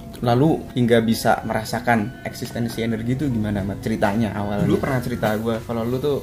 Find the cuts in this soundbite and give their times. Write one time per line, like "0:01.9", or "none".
0:04.6